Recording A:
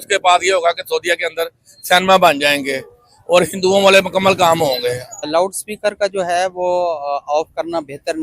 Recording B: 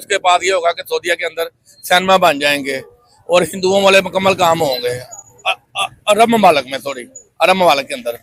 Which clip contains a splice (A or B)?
A